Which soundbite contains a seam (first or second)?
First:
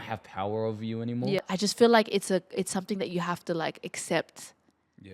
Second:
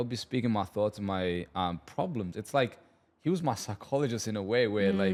first